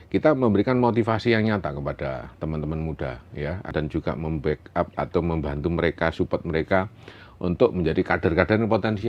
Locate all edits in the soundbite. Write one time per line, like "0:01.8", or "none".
0:03.7